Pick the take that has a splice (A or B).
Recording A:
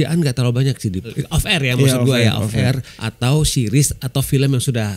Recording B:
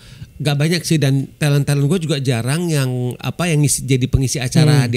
A